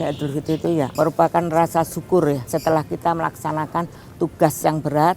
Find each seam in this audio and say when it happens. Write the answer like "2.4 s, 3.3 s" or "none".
0.9 s